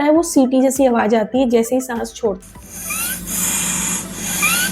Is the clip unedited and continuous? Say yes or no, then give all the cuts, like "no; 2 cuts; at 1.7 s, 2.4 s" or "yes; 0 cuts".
no; 1 cut; at 2.4 s